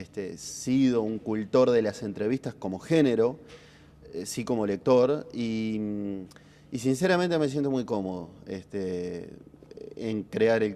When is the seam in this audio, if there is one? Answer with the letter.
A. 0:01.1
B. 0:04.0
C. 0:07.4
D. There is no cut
B